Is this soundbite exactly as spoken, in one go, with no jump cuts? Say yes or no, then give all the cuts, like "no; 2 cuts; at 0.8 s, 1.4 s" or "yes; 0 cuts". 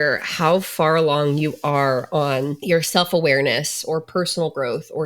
no; 1 cut; at 2.6 s